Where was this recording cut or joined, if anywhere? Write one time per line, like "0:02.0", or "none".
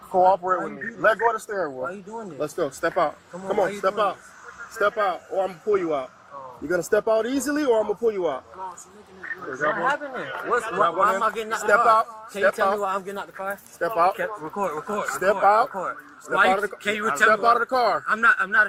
none